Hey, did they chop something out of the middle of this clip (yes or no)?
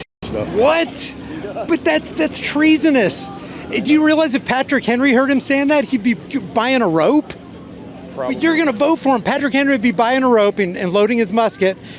no